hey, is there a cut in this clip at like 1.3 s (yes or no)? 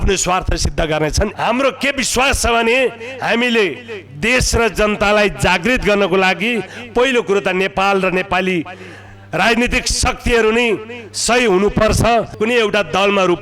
yes